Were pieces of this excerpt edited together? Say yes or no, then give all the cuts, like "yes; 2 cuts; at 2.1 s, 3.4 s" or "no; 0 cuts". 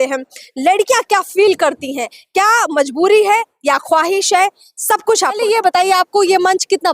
yes; 1 cut; at 5.4 s